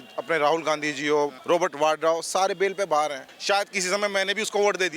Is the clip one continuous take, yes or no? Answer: no